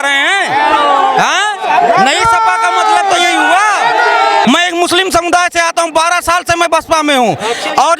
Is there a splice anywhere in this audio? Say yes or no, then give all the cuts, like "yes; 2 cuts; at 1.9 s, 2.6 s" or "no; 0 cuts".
yes; 1 cut; at 4.4 s